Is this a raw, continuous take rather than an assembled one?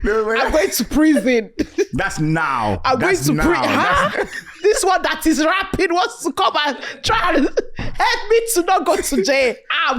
yes; 0 cuts

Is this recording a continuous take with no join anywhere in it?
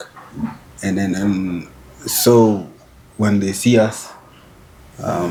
yes; 0 cuts

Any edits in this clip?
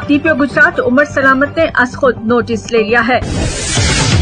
yes; 1 cut; at 3.2 s

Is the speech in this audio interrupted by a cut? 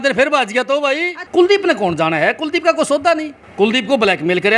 yes; 2 cuts; at 1.2 s, 3.4 s

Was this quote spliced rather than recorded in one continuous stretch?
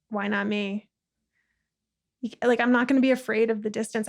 no; 0 cuts

